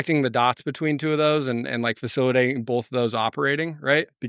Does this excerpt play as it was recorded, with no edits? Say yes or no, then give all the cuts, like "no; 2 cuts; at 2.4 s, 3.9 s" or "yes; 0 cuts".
yes; 0 cuts